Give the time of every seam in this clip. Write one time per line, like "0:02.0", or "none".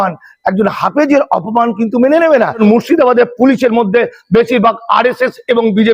0:02.6